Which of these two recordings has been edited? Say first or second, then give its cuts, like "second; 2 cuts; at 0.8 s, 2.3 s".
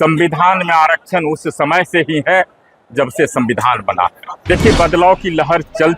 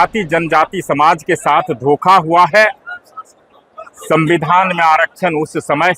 first; 1 cut; at 4.3 s